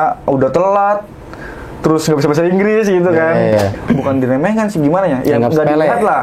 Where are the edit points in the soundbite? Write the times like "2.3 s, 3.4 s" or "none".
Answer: 3.7 s

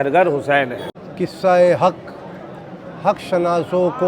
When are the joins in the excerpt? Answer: 1.0 s

